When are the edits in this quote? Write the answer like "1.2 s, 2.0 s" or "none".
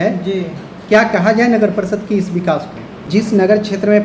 3.1 s